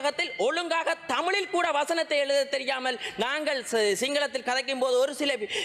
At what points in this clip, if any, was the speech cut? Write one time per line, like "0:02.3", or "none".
none